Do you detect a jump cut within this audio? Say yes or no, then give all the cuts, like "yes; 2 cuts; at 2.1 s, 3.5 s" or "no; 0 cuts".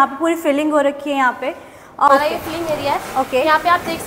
yes; 1 cut; at 2.1 s